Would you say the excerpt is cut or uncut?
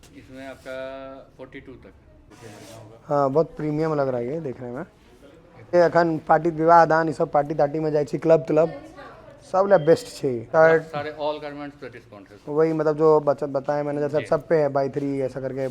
cut